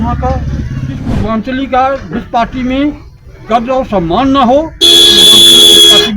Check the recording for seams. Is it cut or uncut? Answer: cut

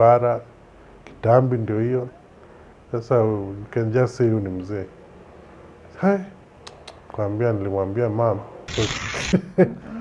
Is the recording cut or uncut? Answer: cut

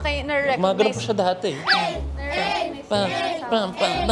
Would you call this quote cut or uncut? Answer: uncut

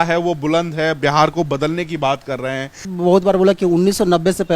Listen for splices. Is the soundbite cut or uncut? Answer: cut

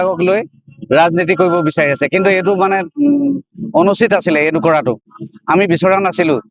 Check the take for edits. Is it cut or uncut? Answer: uncut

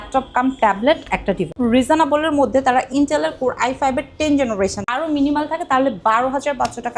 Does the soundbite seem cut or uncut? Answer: cut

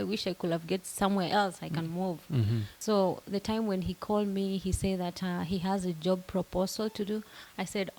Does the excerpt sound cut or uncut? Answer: cut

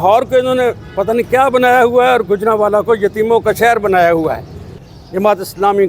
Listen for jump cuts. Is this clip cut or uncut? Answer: cut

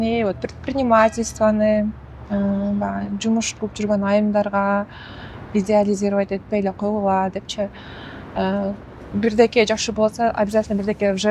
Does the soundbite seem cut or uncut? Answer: uncut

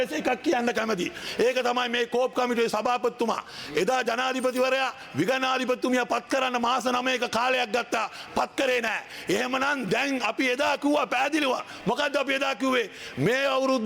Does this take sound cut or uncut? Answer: uncut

